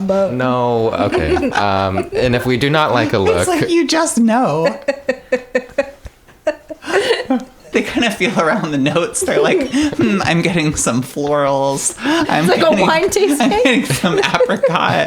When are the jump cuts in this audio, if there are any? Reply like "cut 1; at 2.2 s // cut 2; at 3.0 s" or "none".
cut 1; at 7.7 s